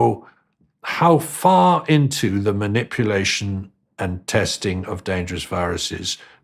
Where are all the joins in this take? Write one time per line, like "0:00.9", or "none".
none